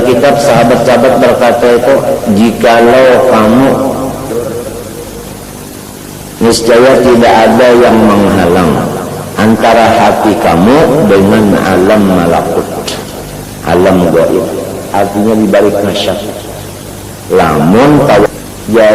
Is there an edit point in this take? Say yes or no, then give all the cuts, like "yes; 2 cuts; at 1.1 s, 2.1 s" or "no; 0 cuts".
yes; 2 cuts; at 4.3 s, 18.3 s